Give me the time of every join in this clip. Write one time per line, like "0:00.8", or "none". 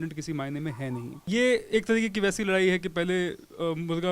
0:01.2